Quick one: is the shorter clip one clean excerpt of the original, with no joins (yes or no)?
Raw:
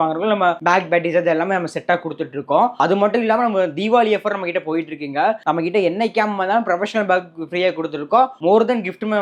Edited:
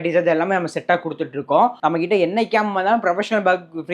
no